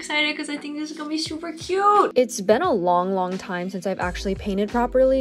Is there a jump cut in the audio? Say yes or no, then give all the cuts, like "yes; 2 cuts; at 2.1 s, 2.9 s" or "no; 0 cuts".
yes; 1 cut; at 2.1 s